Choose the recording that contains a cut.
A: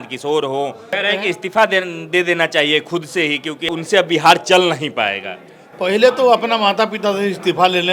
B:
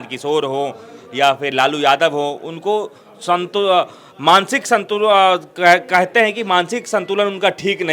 A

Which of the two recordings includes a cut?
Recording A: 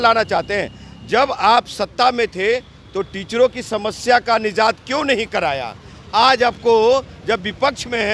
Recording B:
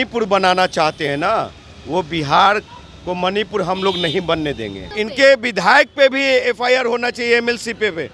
B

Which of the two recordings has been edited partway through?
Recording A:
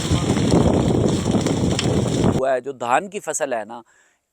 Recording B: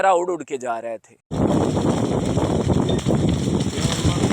A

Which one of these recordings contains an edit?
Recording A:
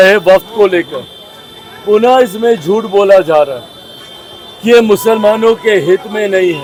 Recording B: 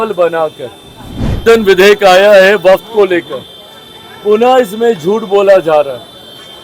B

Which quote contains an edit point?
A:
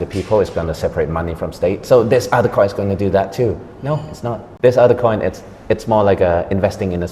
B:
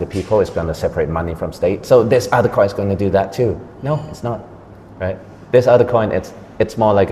A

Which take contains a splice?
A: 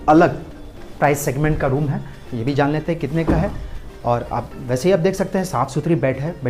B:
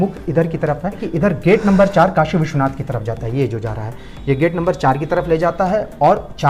B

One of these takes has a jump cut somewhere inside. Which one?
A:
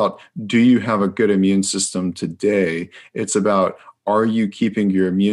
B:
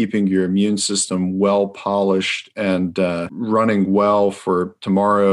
B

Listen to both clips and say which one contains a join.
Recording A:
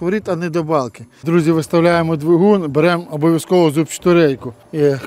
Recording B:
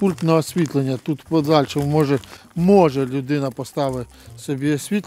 A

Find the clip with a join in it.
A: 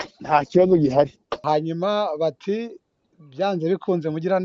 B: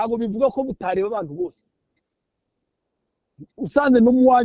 A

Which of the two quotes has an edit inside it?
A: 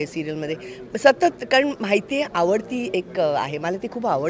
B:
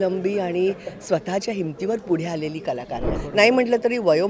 B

